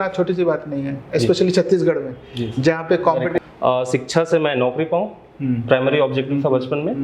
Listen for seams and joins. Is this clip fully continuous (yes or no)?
no